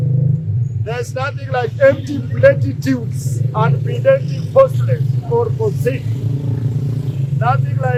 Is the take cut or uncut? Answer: uncut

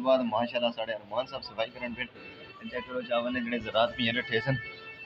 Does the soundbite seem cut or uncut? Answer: uncut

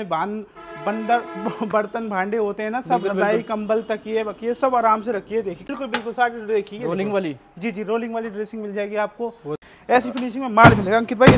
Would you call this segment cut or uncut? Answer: cut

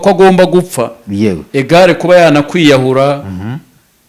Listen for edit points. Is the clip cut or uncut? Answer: uncut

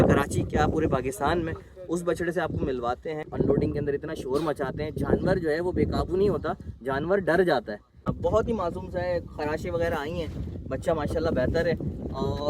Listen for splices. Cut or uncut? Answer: cut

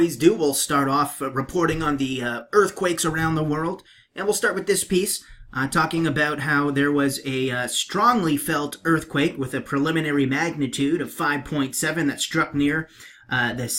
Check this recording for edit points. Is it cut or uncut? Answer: cut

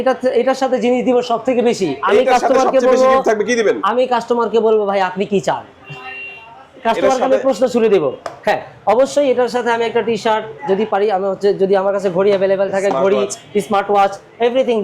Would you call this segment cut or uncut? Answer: uncut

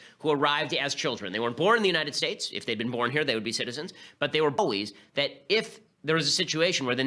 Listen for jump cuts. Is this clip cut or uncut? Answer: uncut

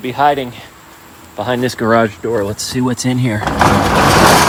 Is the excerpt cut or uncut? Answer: uncut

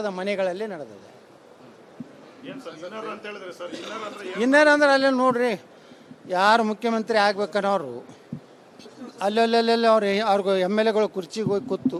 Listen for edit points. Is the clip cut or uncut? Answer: uncut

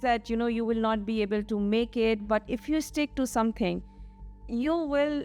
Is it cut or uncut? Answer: uncut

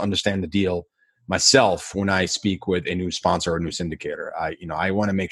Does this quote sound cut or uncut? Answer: uncut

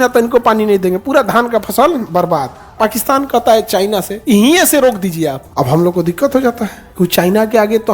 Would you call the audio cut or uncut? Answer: cut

